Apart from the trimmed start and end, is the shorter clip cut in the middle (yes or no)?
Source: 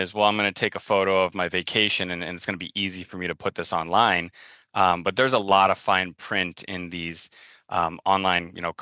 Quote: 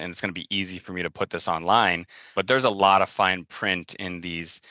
yes